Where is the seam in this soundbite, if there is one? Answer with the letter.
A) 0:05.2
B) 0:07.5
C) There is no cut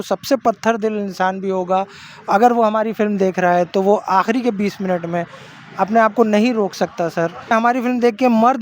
B